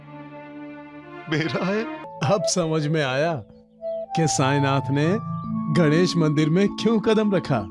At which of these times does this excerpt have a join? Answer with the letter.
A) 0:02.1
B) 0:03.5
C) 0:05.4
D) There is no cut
A